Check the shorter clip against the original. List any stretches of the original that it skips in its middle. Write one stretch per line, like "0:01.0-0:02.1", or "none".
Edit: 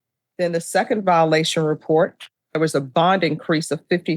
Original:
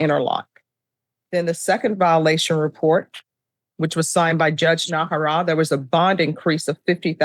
0:03.5-0:05.5